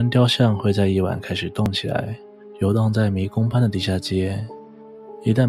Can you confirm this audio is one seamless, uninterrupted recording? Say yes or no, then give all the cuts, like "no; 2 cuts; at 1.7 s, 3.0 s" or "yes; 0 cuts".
yes; 0 cuts